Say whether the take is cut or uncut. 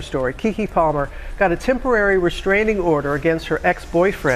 uncut